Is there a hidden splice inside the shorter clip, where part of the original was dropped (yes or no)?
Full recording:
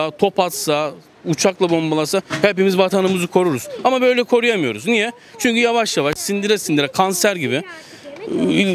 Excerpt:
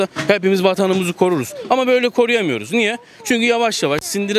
no